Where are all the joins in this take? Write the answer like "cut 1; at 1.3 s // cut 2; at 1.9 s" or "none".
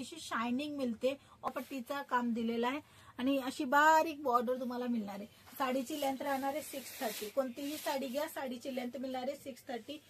cut 1; at 1.5 s